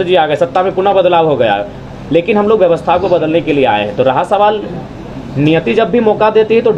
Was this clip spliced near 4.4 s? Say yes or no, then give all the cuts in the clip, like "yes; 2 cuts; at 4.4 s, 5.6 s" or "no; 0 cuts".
no; 0 cuts